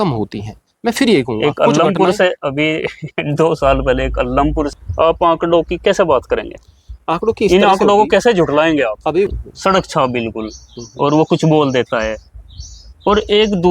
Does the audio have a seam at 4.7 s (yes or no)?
yes